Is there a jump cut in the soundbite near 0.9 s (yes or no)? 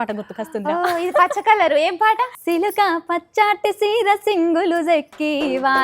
no